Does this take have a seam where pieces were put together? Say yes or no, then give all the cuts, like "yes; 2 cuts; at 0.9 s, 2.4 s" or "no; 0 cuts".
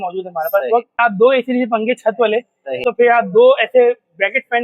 yes; 2 cuts; at 1.0 s, 2.8 s